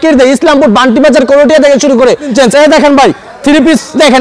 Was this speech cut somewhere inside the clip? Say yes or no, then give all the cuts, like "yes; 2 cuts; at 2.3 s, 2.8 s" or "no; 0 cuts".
yes; 1 cut; at 2.3 s